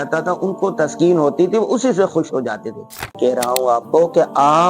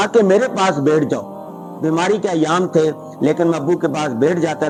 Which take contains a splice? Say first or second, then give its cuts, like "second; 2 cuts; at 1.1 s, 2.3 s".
first; 1 cut; at 3.2 s